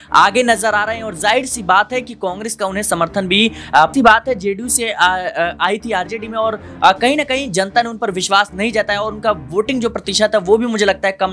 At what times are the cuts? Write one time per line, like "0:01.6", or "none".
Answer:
0:03.9